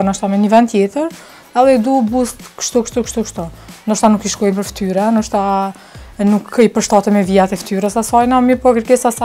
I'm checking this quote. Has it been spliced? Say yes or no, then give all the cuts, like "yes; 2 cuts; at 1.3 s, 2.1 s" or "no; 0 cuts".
no; 0 cuts